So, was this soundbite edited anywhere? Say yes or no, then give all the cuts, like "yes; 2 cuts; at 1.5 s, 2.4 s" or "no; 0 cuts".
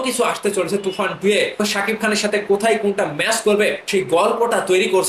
yes; 2 cuts; at 1.6 s, 3.8 s